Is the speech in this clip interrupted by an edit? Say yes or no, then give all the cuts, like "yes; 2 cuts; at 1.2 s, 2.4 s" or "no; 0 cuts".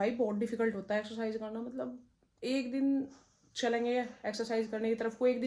no; 0 cuts